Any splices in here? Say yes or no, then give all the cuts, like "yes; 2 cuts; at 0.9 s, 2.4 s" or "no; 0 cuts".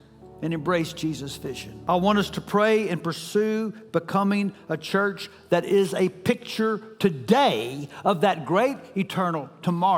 yes; 1 cut; at 1.7 s